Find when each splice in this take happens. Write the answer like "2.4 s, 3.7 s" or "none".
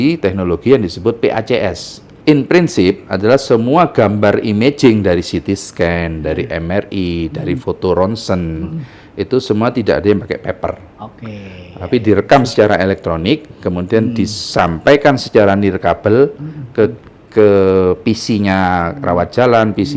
none